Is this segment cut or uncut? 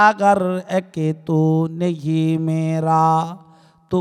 uncut